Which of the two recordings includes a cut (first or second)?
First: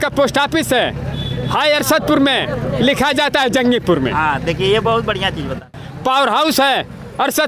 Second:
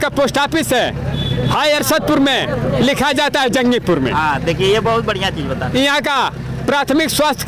first